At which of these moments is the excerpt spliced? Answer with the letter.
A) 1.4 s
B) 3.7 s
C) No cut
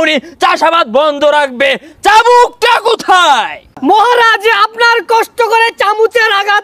B